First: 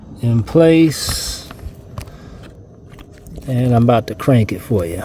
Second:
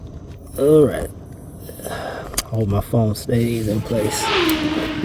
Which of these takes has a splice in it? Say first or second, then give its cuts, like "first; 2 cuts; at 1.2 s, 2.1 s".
second; 1 cut; at 4.1 s